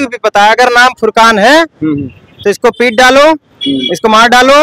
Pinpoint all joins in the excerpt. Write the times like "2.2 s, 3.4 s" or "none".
none